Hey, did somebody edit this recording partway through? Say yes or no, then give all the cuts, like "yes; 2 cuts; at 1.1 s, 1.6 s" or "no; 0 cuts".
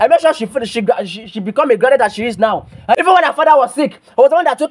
yes; 1 cut; at 3.0 s